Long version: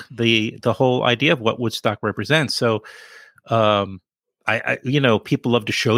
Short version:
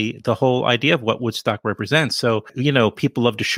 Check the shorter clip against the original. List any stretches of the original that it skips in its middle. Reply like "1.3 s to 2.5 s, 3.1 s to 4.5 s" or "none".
2.9 s to 4.8 s

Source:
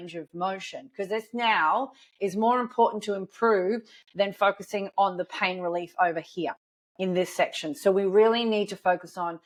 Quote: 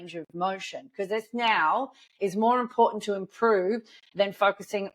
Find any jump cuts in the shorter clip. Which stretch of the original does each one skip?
none

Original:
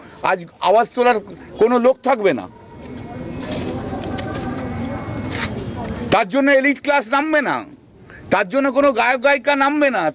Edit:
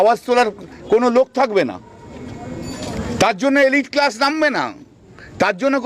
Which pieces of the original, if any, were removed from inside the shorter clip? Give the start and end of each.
3.6 s to 5.8 s

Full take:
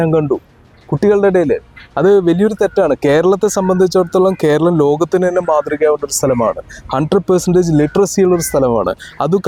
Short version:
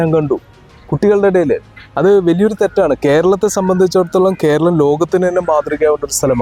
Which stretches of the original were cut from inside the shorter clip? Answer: none

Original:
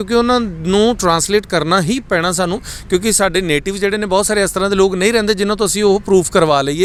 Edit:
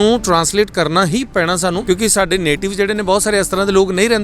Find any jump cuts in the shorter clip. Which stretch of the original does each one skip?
2.6 s to 2.8 s

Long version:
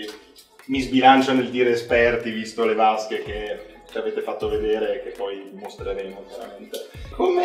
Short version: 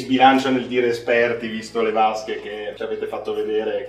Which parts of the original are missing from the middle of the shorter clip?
3.5 s to 3.8 s

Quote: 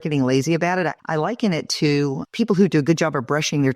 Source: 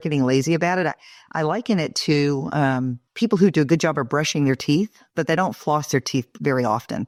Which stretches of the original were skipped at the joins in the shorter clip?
1.0 s to 1.3 s, 2.5 s to 3.0 s

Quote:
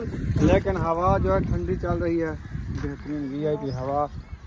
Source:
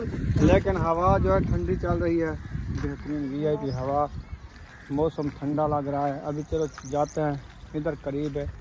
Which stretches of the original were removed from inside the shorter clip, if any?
none

